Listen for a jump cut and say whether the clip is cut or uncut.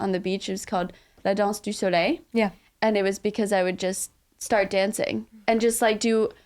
cut